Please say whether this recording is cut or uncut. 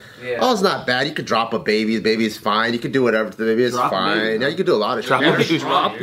cut